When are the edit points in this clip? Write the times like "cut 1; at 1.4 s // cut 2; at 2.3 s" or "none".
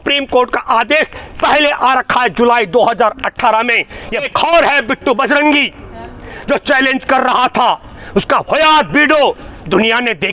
cut 1; at 4.2 s